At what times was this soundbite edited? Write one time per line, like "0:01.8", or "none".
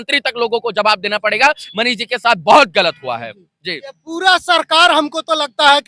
none